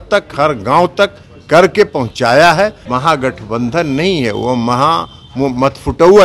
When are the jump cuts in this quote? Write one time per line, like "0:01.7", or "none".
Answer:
0:02.8